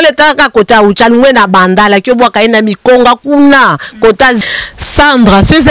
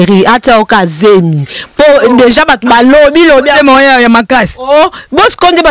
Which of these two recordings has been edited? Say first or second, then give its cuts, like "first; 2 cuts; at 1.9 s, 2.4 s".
first; 1 cut; at 4.4 s